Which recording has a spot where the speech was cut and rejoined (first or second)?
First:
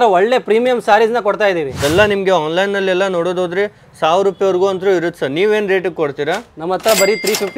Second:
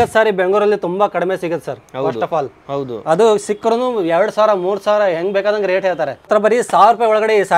first